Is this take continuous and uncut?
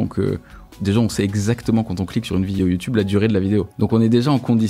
no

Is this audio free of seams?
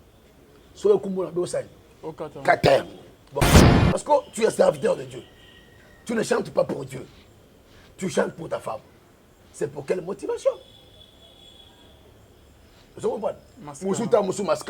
no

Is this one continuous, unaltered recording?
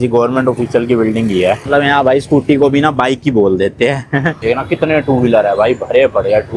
no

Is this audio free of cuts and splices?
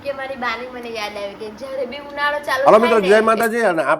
no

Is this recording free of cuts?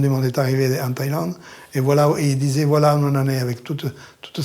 yes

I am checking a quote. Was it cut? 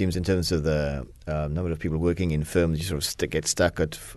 no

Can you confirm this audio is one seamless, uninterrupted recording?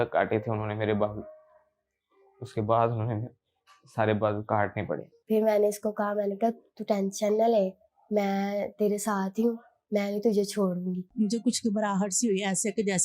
yes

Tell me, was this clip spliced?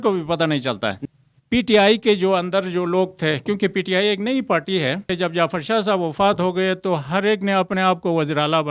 yes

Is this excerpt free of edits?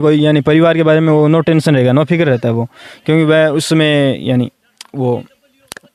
yes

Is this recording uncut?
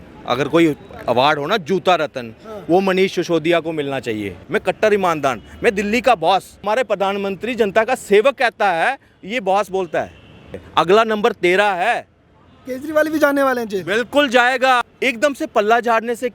no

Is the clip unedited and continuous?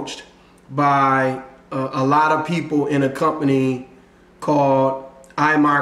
yes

